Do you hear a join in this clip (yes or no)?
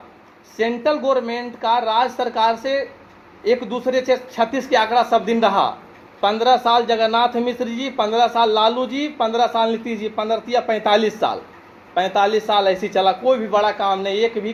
no